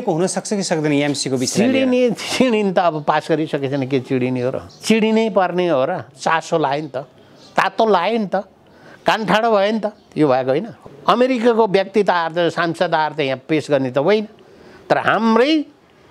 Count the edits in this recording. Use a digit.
2